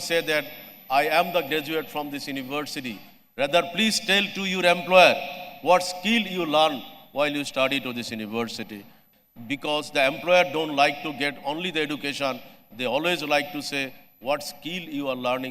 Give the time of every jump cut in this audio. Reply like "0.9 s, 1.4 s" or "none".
9.0 s